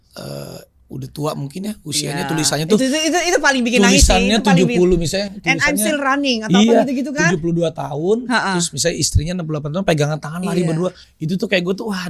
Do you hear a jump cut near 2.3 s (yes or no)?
no